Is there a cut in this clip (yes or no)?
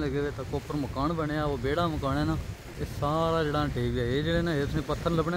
yes